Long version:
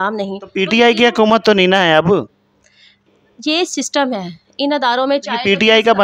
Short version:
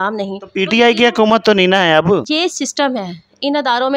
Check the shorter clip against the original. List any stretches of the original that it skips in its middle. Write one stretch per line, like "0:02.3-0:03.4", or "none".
0:02.2-0:03.4

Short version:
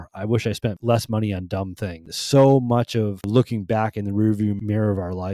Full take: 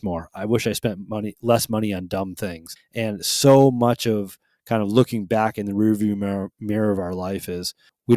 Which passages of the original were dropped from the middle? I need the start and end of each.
0:01.0-0:01.4
0:02.7-0:03.3
0:04.4-0:04.9
0:06.2-0:06.6

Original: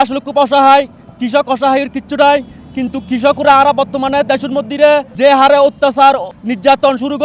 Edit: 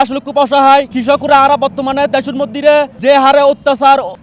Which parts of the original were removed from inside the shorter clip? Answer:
0:00.9-0:03.1

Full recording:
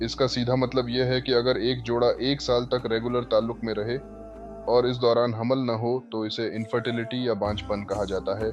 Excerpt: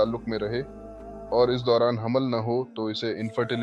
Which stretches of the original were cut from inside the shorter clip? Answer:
none

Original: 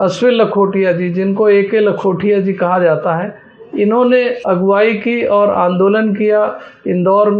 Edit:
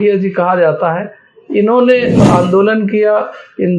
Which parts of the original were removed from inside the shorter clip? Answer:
0:04.5-0:05.5

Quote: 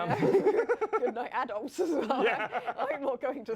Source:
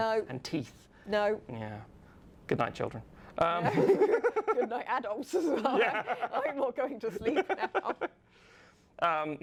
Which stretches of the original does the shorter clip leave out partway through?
none

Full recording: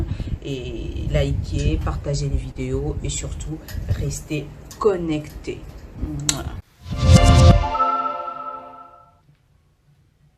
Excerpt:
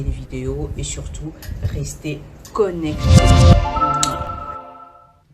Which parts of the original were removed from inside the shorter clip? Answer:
0:05.2-0:07.0

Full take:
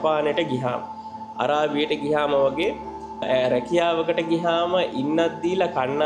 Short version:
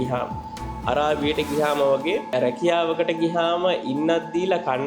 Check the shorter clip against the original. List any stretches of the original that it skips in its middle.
0:02.9-0:03.4

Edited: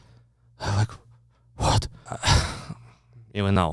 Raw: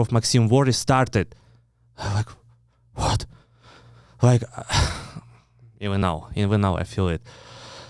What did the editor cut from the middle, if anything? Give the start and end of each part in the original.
0:03.5-0:04.6

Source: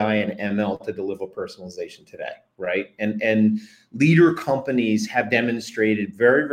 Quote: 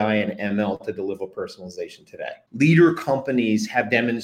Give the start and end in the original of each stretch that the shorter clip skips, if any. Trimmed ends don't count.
0:02.4-0:03.8

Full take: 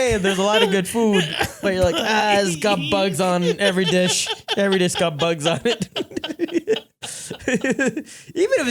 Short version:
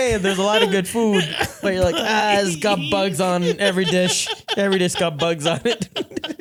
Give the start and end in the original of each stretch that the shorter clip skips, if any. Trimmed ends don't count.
none

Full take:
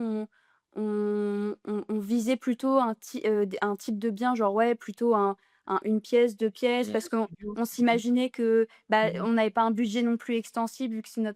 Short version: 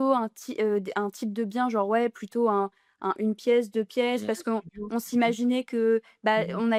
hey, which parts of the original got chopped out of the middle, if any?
none

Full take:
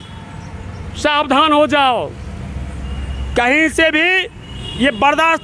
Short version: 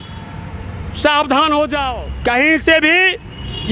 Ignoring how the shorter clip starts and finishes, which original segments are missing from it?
0:02.0-0:03.1

